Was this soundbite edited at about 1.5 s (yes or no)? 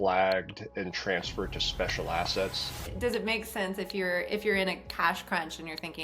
no